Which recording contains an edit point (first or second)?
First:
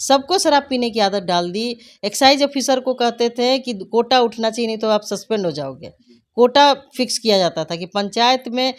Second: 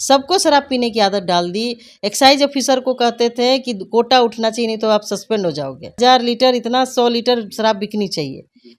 second